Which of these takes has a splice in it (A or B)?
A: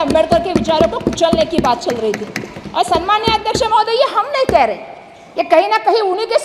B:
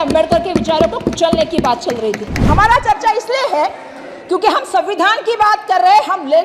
B